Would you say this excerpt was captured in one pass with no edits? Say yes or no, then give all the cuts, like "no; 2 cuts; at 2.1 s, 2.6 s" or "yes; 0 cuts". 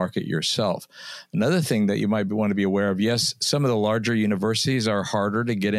yes; 0 cuts